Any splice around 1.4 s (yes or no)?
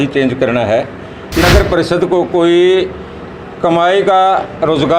yes